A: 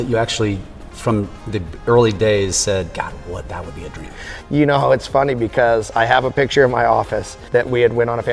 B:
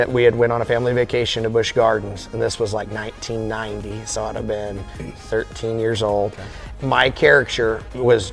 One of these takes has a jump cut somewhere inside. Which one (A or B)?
B